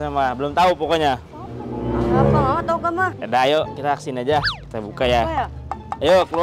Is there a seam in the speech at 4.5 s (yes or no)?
yes